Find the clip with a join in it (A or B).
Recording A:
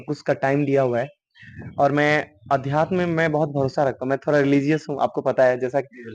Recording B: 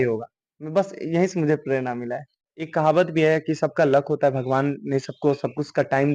B